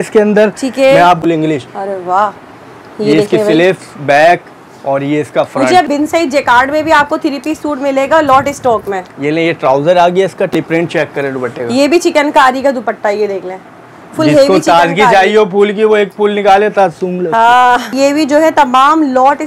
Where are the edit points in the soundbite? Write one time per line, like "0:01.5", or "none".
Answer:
0:01.2
0:05.9
0:10.5
0:17.9